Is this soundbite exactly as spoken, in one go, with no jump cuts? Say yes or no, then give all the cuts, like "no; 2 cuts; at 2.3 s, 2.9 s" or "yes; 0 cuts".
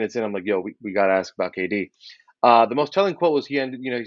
yes; 0 cuts